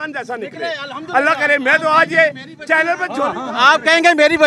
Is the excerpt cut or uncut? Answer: uncut